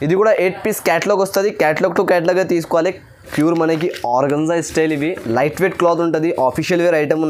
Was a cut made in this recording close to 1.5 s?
no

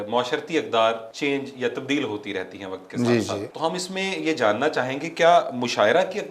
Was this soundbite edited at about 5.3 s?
no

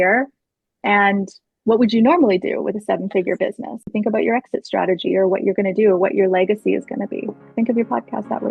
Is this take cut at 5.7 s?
no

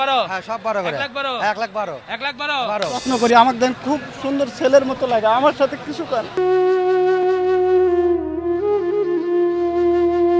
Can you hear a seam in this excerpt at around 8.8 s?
no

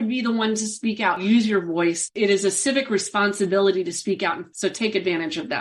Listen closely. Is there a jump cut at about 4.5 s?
yes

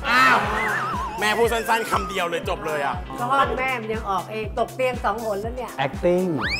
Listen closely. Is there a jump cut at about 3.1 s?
yes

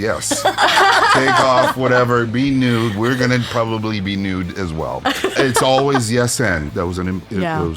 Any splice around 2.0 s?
no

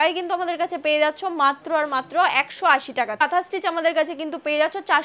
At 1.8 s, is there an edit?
no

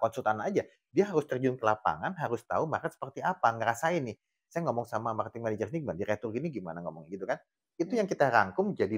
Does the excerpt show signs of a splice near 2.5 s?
no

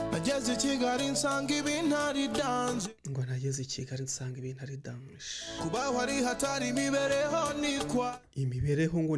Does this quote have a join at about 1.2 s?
no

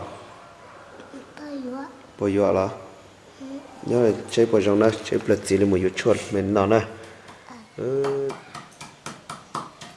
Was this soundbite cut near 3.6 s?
no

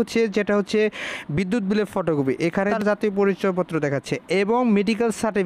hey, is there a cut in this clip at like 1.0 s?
no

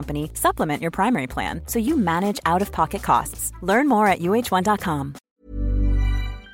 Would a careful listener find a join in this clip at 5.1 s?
yes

